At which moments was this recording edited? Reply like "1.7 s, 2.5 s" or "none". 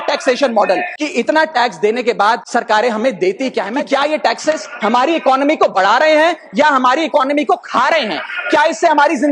0.9 s, 2.4 s, 3.7 s